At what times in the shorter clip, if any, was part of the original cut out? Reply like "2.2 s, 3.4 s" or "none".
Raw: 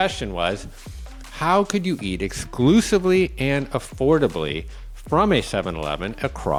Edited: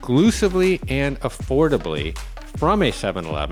none